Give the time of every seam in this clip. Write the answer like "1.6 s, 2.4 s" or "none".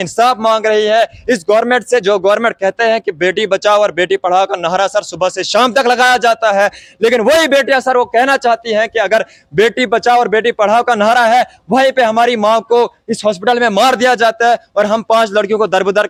none